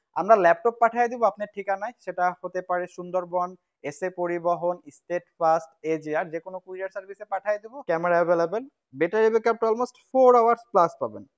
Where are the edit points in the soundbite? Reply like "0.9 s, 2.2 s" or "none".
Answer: 7.7 s